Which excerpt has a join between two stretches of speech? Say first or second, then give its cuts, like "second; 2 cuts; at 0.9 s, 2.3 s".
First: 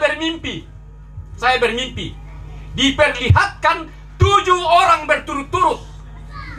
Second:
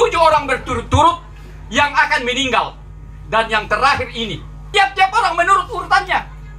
second; 1 cut; at 4.6 s